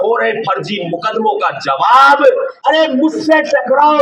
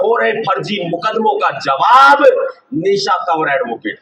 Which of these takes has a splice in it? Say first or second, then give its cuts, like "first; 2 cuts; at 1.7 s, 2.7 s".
first; 1 cut; at 2.5 s